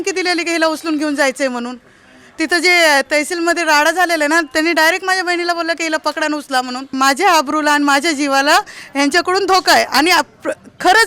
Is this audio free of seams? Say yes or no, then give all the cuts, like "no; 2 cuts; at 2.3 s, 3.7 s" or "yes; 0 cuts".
no; 1 cut; at 6.9 s